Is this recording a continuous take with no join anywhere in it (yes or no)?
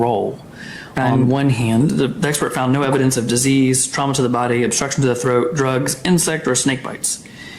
no